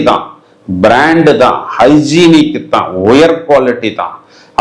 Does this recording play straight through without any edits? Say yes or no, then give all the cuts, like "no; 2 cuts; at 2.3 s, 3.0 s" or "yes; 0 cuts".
yes; 0 cuts